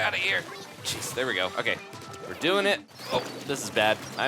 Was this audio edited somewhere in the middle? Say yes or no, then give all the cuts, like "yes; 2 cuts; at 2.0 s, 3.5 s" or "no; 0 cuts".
yes; 1 cut; at 2.9 s